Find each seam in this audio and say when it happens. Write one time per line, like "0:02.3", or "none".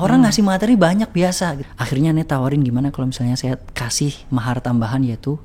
0:01.6